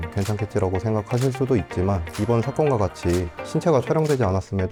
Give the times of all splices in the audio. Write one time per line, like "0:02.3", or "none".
none